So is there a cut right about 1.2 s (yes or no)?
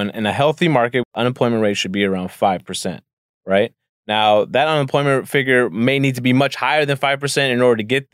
yes